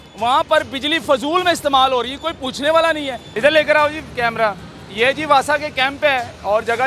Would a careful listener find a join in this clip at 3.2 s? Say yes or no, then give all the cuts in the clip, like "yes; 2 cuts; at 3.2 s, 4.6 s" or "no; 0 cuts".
yes; 1 cut; at 3.2 s